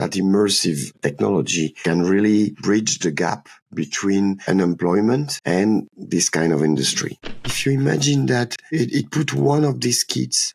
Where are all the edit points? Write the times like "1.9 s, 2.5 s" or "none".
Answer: 7.3 s